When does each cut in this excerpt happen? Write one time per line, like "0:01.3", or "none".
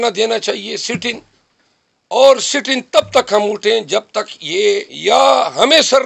0:04.9

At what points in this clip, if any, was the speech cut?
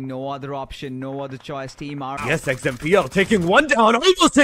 0:02.2

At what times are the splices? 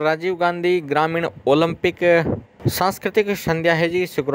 none

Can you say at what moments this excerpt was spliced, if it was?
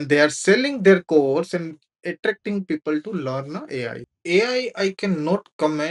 0:04.1

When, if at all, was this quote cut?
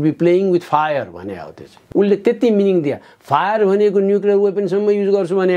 0:01.8

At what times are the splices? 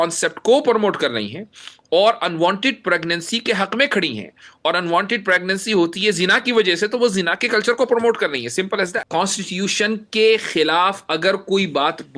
0:09.0

